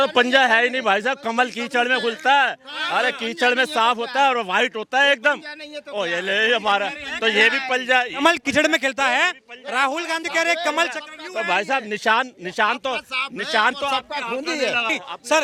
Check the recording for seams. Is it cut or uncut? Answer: uncut